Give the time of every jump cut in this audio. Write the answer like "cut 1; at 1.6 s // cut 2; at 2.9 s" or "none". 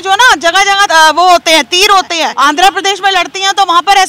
cut 1; at 0.9 s // cut 2; at 2.3 s